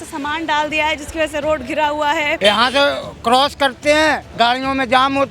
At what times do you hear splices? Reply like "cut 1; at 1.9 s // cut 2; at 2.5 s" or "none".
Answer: cut 1; at 2.4 s